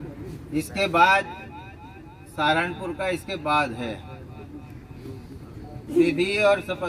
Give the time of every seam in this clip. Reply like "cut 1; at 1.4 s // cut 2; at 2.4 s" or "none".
none